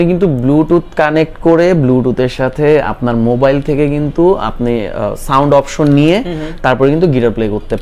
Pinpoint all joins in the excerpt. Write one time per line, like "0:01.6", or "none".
none